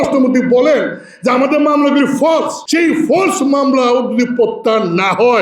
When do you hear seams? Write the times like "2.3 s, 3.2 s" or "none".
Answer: 2.6 s